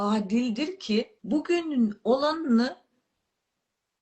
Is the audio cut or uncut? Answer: cut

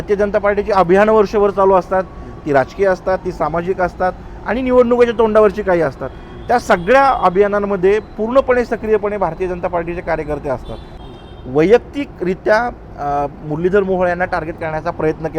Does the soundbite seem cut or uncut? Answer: cut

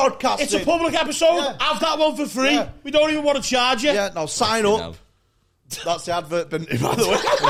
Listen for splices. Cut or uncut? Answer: uncut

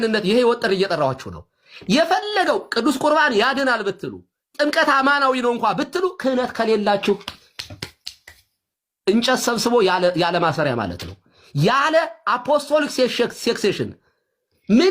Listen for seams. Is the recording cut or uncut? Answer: cut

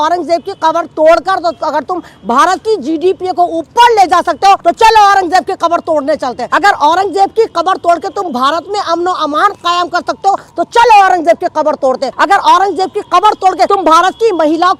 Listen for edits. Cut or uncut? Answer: cut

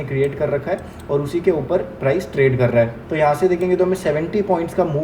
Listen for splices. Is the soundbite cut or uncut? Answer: cut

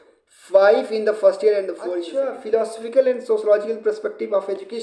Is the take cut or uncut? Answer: cut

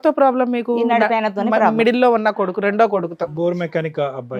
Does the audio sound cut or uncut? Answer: uncut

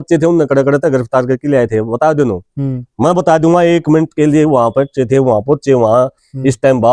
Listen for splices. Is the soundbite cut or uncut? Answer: uncut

